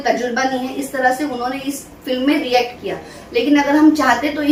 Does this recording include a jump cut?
no; 0 cuts

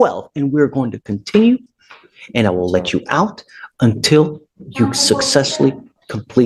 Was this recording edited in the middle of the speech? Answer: no; 0 cuts

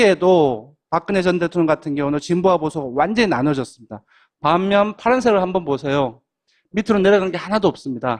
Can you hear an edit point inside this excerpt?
no; 0 cuts

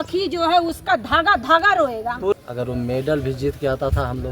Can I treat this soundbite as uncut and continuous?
no; 1 cut; at 2.3 s

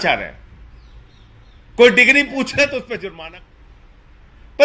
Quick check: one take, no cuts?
no; 1 cut; at 3.1 s

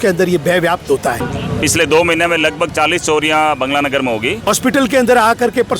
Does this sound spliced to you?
yes; 2 cuts; at 1.3 s, 4.5 s

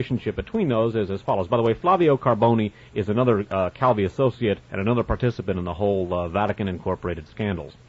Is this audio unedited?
yes; 0 cuts

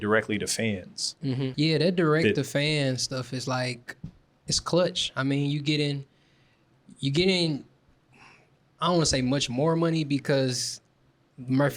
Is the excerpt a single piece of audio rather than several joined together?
no; 1 cut; at 1.5 s

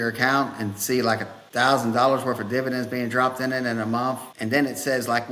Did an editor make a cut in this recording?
yes; 2 cuts; at 1.4 s, 4.3 s

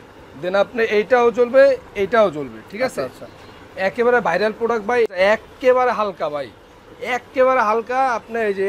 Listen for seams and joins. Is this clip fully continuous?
no; 1 cut; at 5.1 s

